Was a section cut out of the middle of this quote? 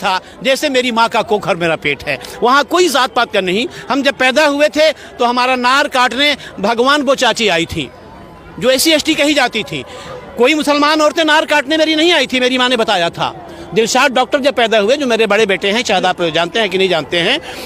no; 0 cuts

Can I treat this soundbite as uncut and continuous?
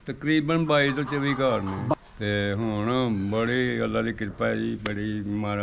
no; 1 cut; at 1.9 s

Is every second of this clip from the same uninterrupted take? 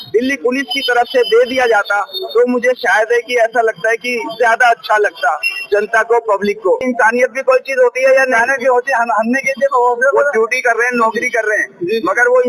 no; 1 cut; at 6.8 s

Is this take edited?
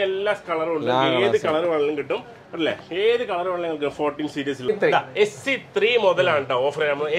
yes; 1 cut; at 4.7 s

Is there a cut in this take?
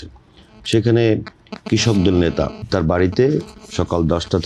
yes; 2 cuts; at 2.7 s, 3.6 s

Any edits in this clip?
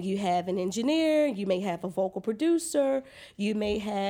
no; 0 cuts

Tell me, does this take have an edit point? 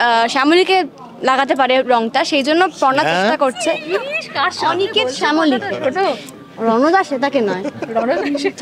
no; 0 cuts

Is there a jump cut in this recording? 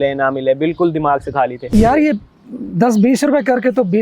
yes; 1 cut; at 1.7 s

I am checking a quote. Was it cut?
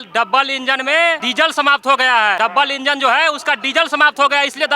yes; 2 cuts; at 1.2 s, 2.4 s

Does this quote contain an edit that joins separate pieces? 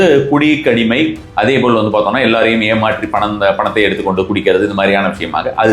no; 0 cuts

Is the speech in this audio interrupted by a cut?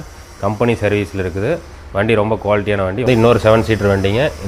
yes; 1 cut; at 3.1 s

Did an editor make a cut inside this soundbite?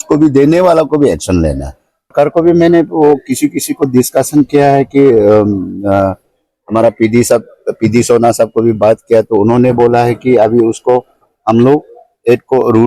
yes; 1 cut; at 2.1 s

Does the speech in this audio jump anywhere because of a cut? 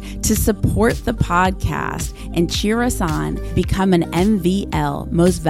no; 0 cuts

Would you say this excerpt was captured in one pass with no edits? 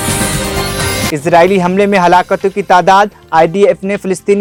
yes; 0 cuts

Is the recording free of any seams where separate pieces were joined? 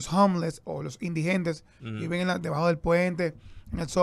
yes; 0 cuts

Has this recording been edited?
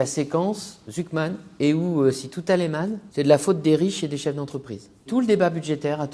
yes; 3 cuts; at 1.4 s, 3.0 s, 5.1 s

